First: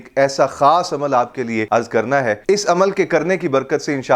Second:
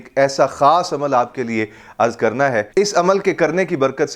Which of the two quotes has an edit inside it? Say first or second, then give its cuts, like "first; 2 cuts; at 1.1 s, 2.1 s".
first; 1 cut; at 1.6 s